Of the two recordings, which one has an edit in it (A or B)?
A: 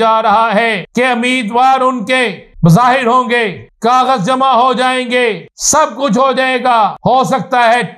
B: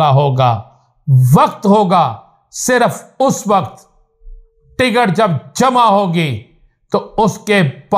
A